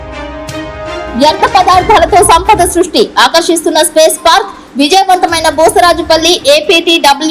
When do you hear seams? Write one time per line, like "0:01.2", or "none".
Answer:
0:01.1